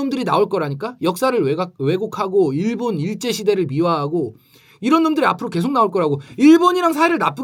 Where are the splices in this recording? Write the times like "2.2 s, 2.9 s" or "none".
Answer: none